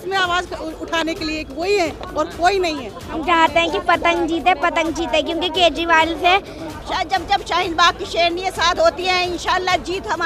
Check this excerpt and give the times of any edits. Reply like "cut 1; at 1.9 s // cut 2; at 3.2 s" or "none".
cut 1; at 3.1 s // cut 2; at 6.8 s